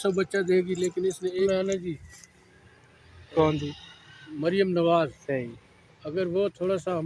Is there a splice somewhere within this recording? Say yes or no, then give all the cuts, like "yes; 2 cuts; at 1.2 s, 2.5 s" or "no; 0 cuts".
yes; 1 cut; at 1.5 s